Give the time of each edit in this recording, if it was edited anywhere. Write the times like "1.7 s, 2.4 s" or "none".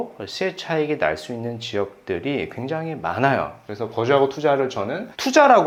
none